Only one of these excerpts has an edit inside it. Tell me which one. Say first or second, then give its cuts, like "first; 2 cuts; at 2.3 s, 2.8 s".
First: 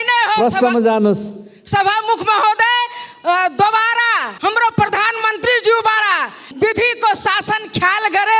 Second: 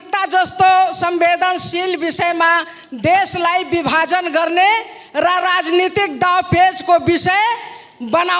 first; 2 cuts; at 4.3 s, 6.5 s